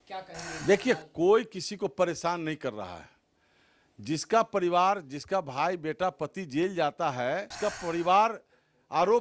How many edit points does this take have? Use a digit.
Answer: 1